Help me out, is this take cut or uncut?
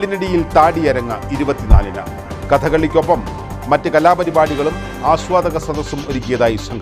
uncut